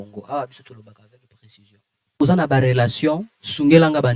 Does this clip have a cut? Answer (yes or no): yes